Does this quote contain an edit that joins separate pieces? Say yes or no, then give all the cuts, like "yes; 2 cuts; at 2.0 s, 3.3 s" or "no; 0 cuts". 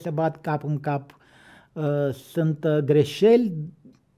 no; 0 cuts